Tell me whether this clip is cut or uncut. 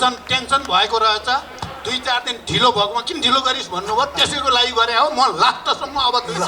uncut